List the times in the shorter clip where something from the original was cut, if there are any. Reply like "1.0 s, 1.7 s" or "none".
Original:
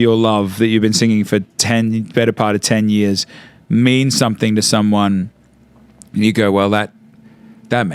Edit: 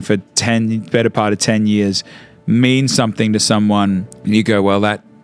4.1 s